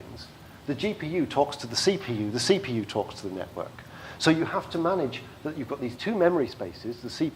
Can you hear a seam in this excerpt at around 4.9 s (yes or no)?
yes